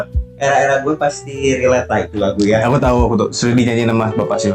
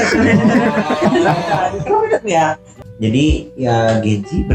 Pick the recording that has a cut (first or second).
second